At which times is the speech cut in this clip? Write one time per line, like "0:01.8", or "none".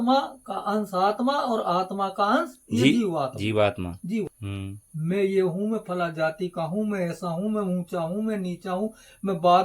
0:04.3